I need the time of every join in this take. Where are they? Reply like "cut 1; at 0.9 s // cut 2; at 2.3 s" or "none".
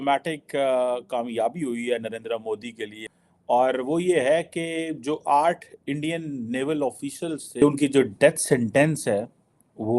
cut 1; at 3.0 s // cut 2; at 7.6 s